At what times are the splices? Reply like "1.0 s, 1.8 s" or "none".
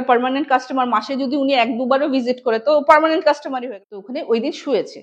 3.6 s